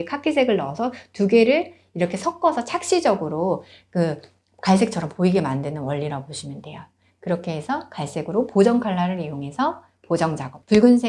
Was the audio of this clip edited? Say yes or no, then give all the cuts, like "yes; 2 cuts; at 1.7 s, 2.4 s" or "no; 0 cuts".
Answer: no; 0 cuts